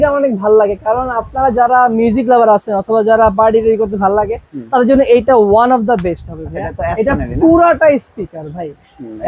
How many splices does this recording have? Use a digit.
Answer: 0